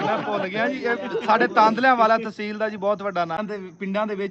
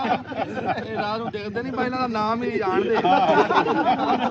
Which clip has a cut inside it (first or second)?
first